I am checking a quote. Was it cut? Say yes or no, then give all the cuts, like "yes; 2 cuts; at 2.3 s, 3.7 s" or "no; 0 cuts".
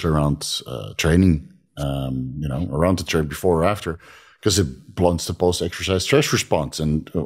no; 0 cuts